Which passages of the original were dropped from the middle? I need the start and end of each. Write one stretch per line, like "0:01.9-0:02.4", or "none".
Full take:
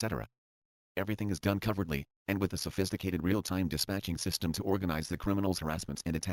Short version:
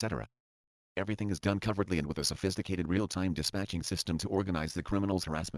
0:02.2-0:02.6

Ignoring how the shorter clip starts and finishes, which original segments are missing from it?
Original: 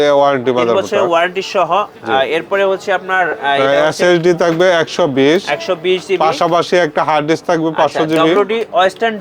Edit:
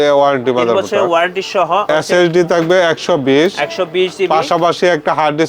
0:01.9-0:03.8

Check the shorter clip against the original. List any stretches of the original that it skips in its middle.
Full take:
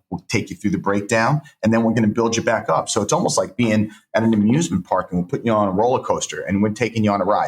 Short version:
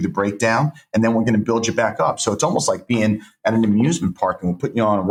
none

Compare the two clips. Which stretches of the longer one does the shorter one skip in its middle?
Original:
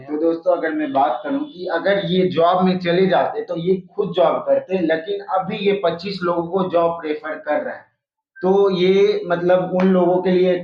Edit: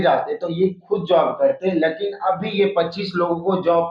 none

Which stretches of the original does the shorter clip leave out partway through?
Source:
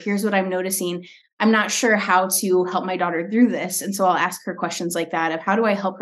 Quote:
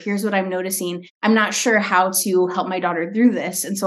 0:01.1-0:01.2

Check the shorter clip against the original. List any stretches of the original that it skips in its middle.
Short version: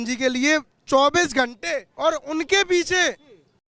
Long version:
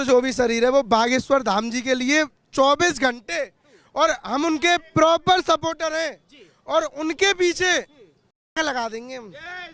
0:03.5-0:06.6

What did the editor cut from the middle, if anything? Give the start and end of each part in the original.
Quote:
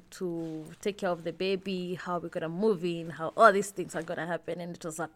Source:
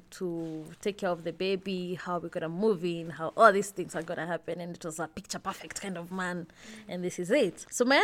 none

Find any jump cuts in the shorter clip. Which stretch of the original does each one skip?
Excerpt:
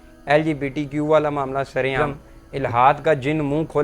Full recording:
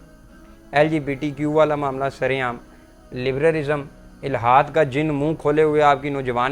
0:02.4-0:03.7

